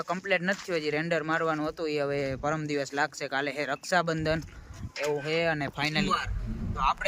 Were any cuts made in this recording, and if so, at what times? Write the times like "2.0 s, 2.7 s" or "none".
6.0 s